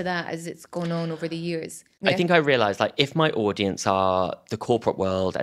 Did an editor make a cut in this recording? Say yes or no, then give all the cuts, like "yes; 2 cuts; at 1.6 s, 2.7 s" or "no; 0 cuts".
yes; 1 cut; at 1.9 s